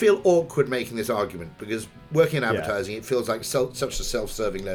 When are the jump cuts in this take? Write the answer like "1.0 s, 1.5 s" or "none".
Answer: none